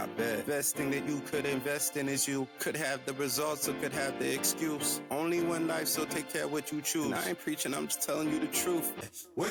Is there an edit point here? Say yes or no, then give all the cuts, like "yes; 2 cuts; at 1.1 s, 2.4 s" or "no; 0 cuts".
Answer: no; 0 cuts